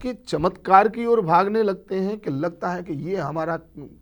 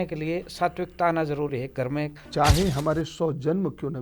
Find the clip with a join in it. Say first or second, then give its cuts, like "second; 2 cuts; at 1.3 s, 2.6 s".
second; 1 cut; at 2.2 s